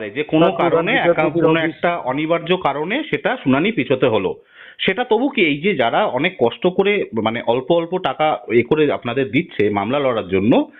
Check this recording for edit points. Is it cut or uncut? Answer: uncut